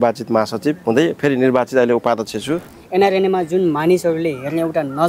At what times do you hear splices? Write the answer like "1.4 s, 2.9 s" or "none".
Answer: 2.8 s